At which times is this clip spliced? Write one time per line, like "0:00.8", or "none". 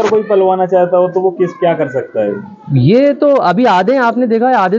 none